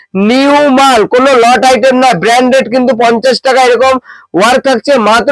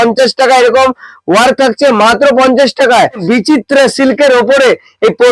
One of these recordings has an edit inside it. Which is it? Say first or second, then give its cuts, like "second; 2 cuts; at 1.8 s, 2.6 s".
second; 1 cut; at 3.2 s